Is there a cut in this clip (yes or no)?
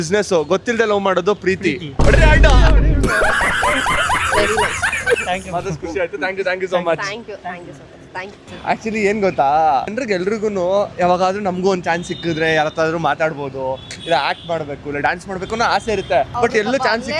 no